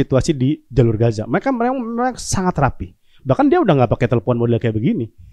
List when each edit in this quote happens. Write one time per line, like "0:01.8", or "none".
none